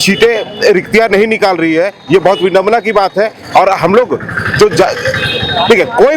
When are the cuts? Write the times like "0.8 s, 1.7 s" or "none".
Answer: none